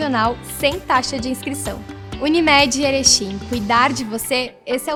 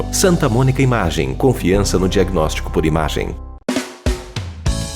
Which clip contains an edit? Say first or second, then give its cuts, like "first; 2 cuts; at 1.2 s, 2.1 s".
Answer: second; 1 cut; at 3.6 s